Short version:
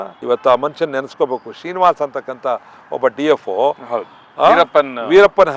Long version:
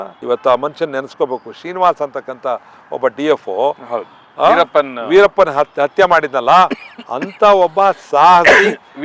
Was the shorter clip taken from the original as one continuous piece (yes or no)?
yes